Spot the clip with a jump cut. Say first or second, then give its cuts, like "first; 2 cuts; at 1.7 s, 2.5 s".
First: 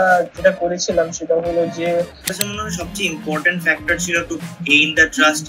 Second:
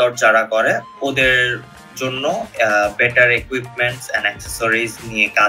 first; 1 cut; at 2.3 s